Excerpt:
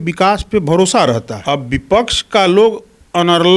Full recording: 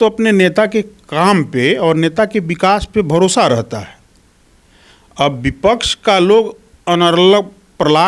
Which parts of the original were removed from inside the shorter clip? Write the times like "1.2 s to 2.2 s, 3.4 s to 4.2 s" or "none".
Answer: 3.7 s to 5.0 s